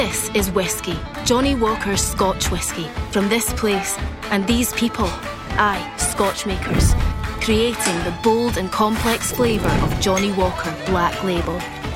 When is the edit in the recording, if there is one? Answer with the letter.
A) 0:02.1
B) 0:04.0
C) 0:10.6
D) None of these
D